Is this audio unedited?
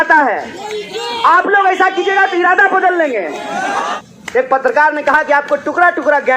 no; 1 cut; at 4.0 s

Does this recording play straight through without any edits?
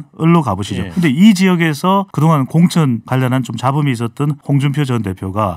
no; 4 cuts; at 0.9 s, 2.1 s, 3.0 s, 4.4 s

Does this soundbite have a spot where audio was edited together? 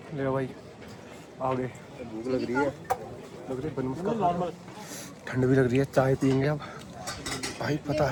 no; 0 cuts

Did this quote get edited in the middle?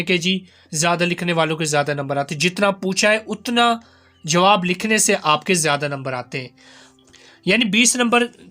yes; 1 cut; at 6.8 s

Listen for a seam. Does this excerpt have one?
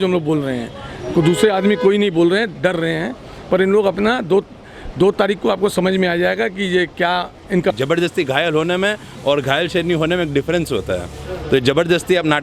yes; 1 cut; at 7.7 s

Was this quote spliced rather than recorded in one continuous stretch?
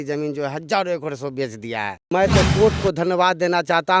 yes; 1 cut; at 2.0 s

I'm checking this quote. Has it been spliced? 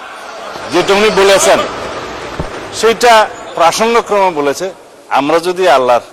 no; 0 cuts

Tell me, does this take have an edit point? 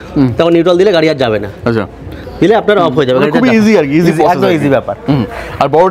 no; 0 cuts

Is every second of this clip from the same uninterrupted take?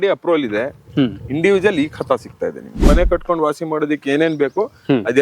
no; 1 cut; at 2.8 s

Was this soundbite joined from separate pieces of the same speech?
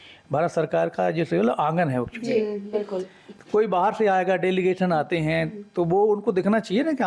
no; 0 cuts

